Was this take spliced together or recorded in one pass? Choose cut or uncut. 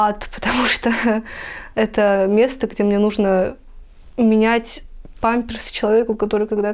uncut